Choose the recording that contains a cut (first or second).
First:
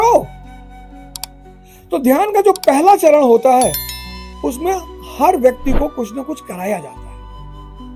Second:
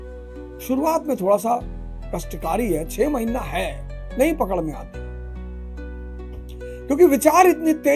second